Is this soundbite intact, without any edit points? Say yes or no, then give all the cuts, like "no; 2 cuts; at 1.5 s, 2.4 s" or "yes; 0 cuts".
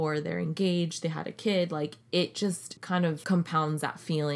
no; 1 cut; at 2.9 s